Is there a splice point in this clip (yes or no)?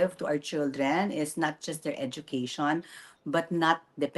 no